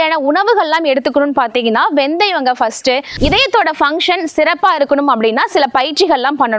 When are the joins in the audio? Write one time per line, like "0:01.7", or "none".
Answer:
0:03.1